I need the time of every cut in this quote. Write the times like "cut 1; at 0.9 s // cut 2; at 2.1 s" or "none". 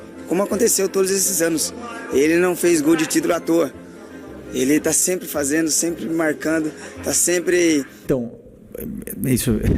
cut 1; at 8.1 s